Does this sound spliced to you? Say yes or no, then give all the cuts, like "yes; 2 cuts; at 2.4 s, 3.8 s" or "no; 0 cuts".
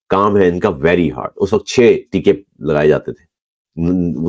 no; 0 cuts